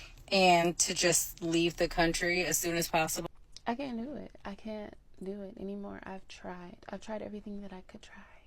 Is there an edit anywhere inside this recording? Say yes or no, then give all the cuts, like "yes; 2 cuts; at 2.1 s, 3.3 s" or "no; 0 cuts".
yes; 1 cut; at 3.2 s